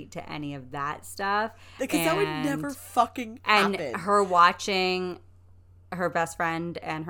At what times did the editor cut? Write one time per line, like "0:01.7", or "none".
none